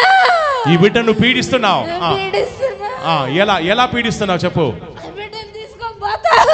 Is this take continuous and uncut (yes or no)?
yes